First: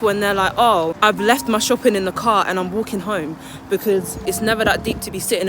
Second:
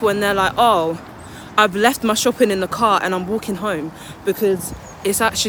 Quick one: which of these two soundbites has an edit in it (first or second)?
first